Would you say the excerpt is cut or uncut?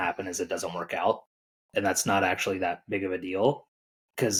uncut